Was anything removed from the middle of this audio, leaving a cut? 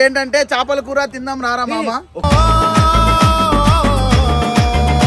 no; 0 cuts

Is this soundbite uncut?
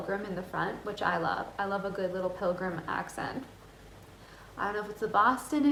yes; 0 cuts

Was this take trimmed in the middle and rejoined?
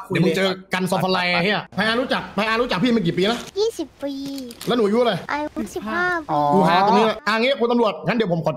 yes; 4 cuts; at 1.7 s, 3.5 s, 5.3 s, 7.2 s

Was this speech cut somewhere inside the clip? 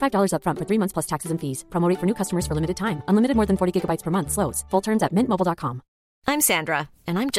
no; 0 cuts

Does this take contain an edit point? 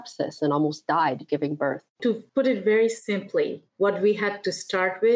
yes; 1 cut; at 2.1 s

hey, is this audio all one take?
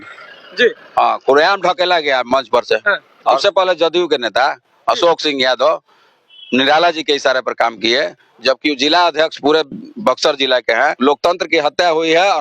no; 2 cuts; at 3.4 s, 10.9 s

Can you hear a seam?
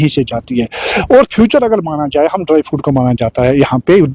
no; 0 cuts

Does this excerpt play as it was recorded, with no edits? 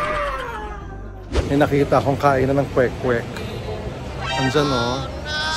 no; 1 cut; at 1.2 s

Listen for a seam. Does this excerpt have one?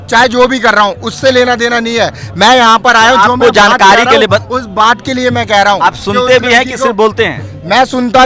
no; 0 cuts

